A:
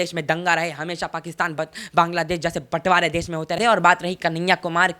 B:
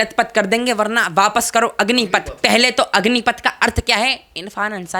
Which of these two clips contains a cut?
A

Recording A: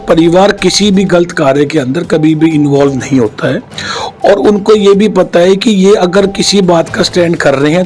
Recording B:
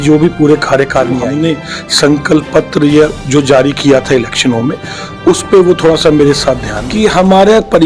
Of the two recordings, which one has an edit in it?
B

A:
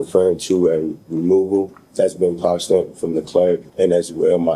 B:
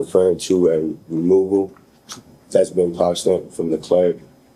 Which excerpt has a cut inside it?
A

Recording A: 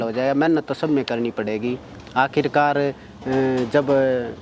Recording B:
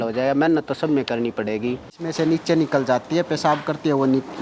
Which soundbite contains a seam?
B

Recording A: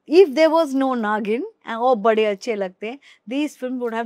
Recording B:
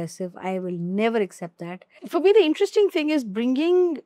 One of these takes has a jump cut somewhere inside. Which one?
B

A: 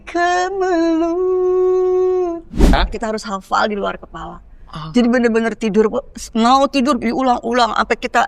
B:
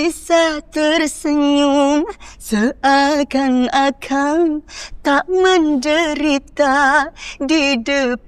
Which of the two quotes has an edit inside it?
A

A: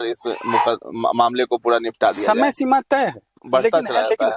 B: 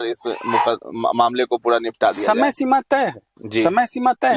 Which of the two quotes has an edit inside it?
A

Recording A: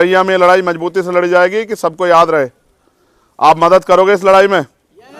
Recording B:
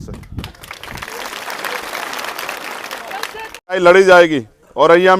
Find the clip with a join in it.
B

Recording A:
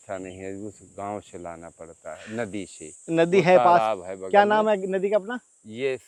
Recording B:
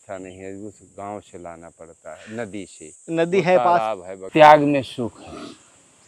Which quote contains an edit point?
B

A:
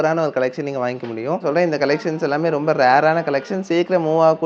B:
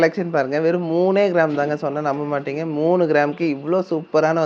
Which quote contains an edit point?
A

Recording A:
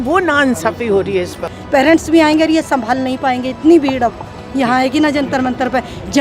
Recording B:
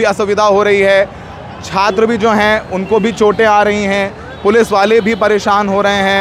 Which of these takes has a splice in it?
A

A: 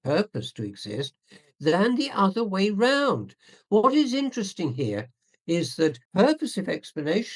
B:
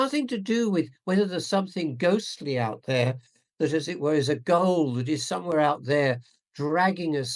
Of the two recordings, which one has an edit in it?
A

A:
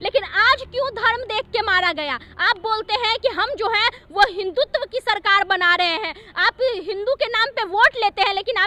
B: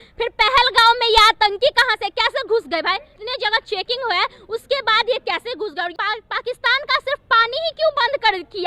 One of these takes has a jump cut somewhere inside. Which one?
B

